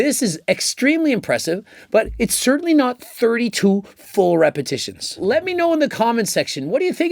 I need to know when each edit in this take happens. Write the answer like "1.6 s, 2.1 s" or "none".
5.2 s

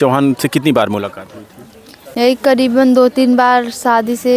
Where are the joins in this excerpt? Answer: none

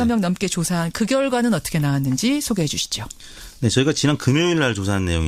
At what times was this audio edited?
none

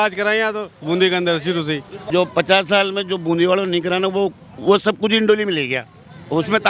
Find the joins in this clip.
1.9 s

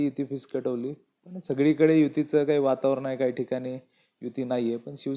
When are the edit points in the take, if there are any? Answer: none

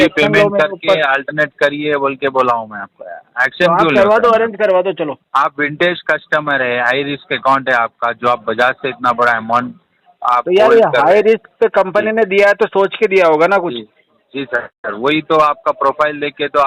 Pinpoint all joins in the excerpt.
none

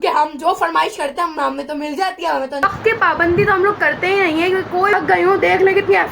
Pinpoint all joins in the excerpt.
2.8 s, 4.9 s

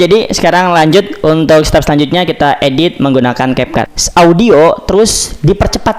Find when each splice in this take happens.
3.9 s

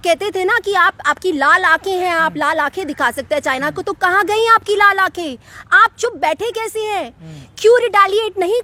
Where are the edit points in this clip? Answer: none

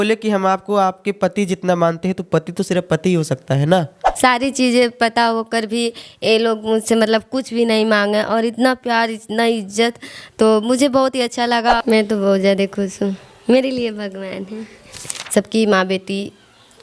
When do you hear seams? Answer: 4.0 s, 11.8 s, 15.1 s

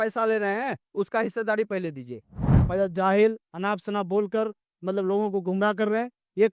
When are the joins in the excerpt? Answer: 2.3 s

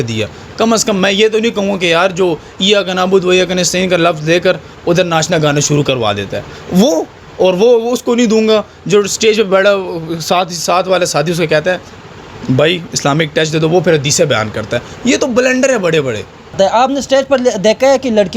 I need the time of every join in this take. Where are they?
16.5 s

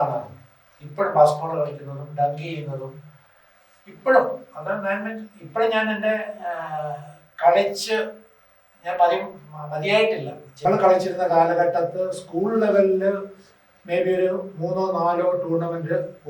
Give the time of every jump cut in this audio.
10.4 s

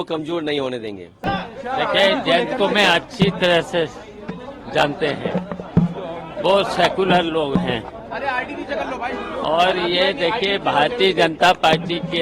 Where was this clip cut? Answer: 1.1 s

